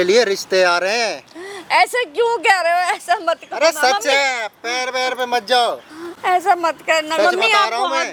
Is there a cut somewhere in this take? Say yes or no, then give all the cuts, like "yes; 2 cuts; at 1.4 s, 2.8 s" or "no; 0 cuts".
no; 0 cuts